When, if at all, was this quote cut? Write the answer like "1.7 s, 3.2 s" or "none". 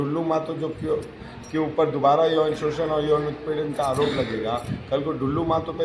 none